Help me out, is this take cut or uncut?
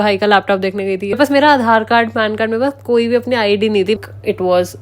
cut